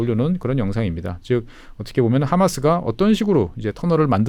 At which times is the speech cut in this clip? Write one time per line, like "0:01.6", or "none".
none